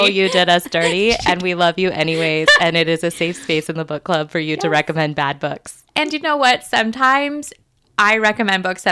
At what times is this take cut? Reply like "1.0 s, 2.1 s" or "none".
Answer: none